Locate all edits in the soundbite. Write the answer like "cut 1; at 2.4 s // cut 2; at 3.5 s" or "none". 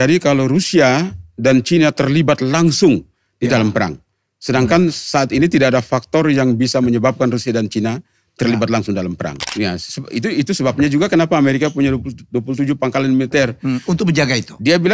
cut 1; at 9.4 s